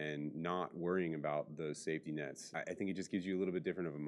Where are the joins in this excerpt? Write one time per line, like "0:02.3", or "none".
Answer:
0:02.4